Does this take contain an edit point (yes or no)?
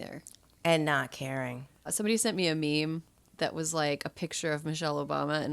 yes